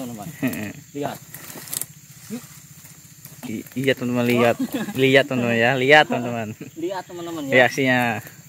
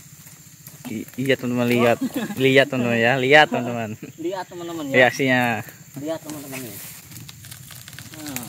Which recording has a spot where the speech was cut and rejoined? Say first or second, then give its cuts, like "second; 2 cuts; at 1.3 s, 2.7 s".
second; 1 cut; at 7.0 s